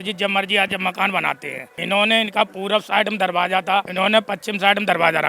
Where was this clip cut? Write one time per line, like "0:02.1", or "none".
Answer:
0:03.9